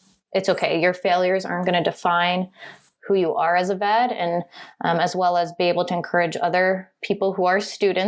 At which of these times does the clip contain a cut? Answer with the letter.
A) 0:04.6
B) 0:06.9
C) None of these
B